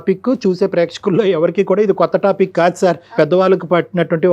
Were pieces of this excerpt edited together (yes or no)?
yes